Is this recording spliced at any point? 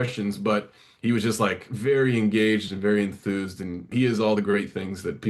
yes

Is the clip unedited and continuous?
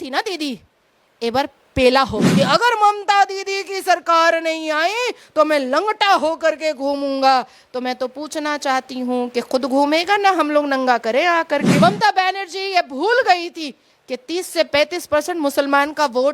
no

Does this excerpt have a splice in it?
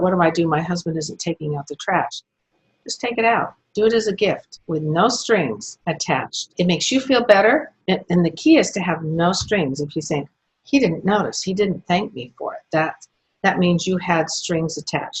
no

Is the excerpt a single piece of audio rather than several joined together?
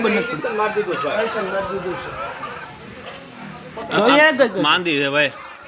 yes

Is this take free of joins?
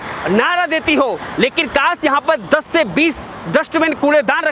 yes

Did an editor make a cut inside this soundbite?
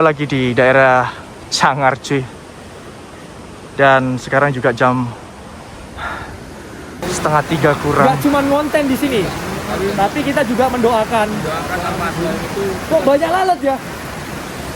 yes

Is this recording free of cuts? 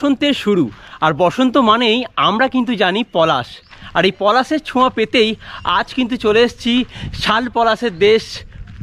yes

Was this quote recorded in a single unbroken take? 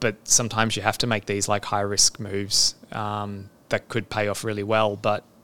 yes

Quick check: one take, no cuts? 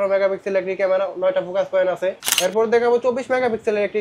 no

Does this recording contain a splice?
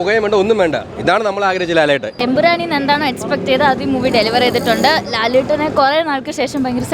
yes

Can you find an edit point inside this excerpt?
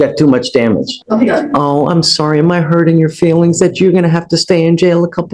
yes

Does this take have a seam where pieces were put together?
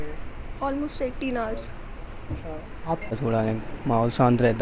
yes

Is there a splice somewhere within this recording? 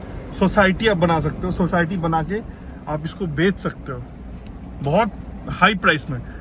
no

